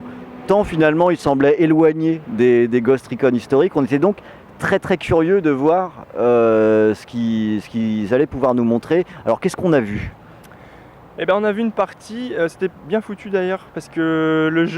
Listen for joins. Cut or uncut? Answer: cut